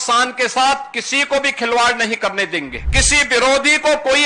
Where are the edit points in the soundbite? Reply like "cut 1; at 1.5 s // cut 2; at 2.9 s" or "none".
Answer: cut 1; at 2.8 s